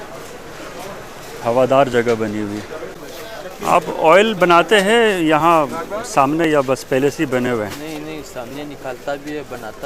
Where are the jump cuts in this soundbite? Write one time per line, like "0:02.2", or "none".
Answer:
0:03.0